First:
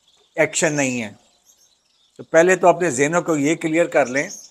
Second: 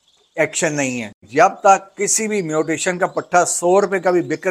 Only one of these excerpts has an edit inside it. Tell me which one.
second; 1 cut; at 1.2 s

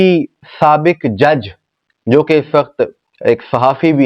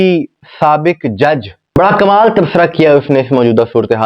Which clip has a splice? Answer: second; 1 cut; at 1.8 s

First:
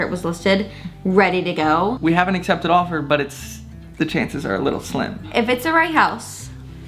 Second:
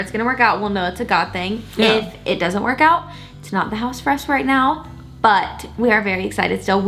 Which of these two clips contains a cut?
first; 2 cuts; at 2.0 s, 5.3 s

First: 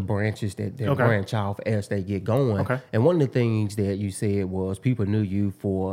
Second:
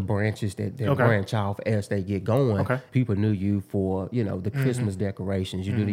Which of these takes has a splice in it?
second; 1 cut; at 2.8 s

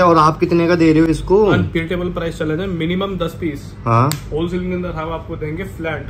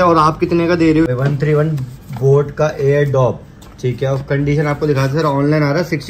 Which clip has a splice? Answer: second; 1 cut; at 1.1 s

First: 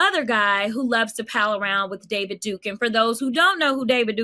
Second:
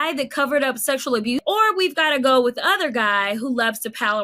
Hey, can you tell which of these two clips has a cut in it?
second; 1 cut; at 1.4 s

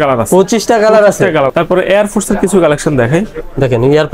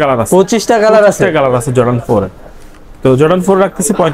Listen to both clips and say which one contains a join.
first; 1 cut; at 1.5 s

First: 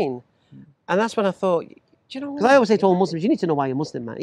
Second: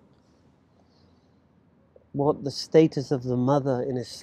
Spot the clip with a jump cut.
first; 1 cut; at 2.2 s

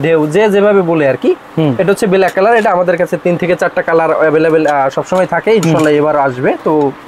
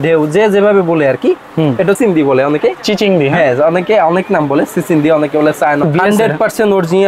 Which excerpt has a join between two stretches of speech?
second; 2 cuts; at 2.0 s, 5.8 s

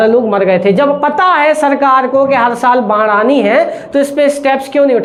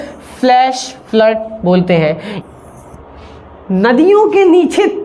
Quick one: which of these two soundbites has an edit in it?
second; 1 cut; at 2.3 s

